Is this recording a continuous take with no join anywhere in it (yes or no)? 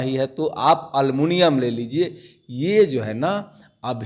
yes